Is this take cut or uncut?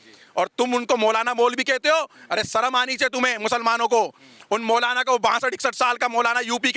uncut